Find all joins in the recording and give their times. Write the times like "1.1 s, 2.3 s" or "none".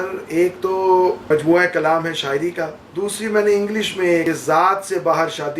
1.2 s, 2.8 s, 4.2 s